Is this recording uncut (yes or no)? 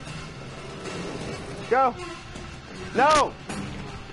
yes